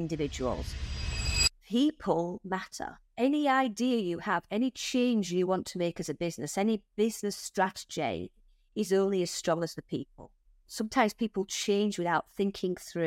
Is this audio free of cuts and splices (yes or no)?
no